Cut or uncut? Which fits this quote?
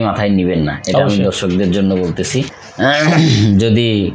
cut